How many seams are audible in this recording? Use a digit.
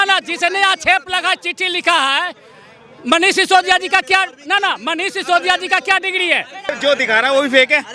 1